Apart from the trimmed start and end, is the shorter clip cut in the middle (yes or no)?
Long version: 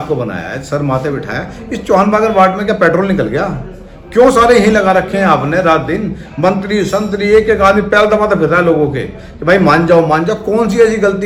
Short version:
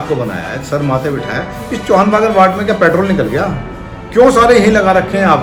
no